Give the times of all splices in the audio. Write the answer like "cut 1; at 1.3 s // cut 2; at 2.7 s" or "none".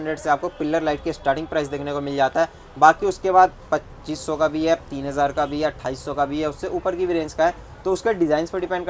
none